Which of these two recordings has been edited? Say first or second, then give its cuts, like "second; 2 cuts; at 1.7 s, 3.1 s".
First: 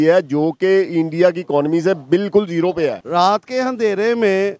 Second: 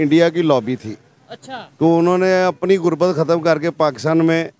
first; 1 cut; at 3.0 s